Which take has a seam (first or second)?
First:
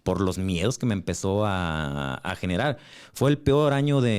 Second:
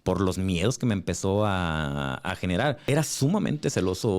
second